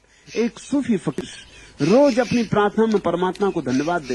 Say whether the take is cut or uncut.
cut